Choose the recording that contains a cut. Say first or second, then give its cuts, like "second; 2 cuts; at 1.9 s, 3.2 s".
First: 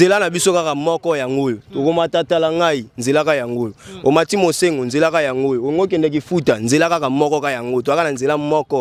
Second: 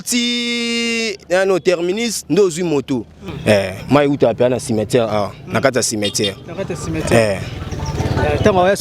second; 1 cut; at 3.3 s